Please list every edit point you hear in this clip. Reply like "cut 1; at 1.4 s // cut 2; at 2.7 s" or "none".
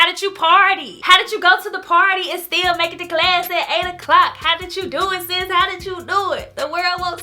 cut 1; at 0.9 s

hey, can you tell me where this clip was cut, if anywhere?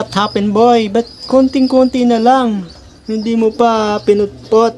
none

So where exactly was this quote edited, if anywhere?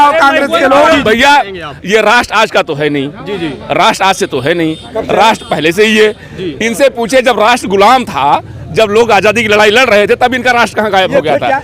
cut 1; at 1.0 s

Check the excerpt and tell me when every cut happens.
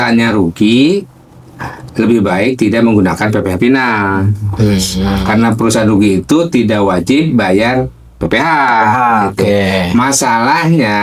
none

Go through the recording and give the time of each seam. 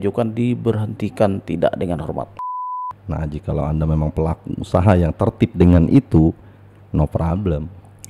cut 1; at 2.4 s

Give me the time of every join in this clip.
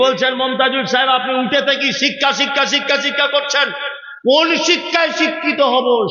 none

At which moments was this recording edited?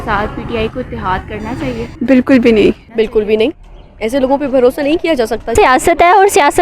cut 1; at 1.9 s // cut 2; at 2.8 s // cut 3; at 5.5 s

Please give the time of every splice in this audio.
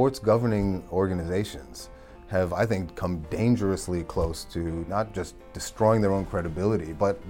none

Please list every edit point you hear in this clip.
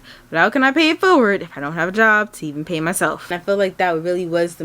cut 1; at 3.3 s

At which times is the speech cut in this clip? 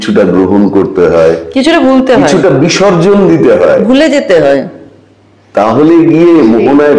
none

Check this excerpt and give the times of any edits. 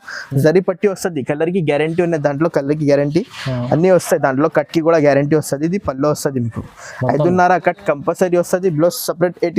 none

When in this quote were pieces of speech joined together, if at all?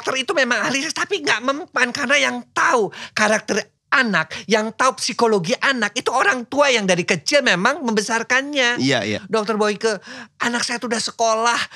cut 1; at 9.2 s

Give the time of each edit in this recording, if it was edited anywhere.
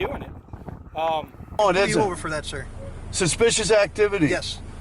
cut 1; at 1.6 s

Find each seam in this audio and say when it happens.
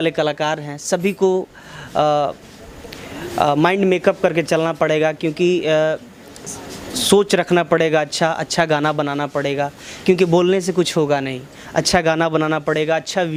none

